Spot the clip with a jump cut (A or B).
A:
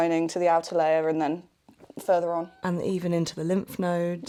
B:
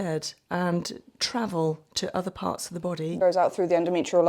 B